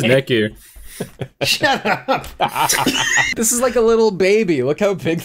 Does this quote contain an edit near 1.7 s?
no; 1 cut; at 3.3 s

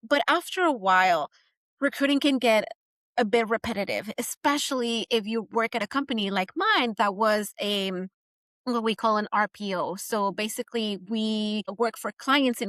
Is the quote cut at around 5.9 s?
no; 1 cut; at 11.7 s

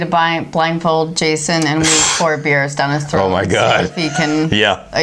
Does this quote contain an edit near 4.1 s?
no; 0 cuts

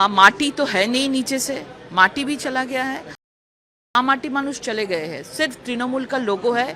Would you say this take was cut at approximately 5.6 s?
no; 1 cut; at 3.3 s

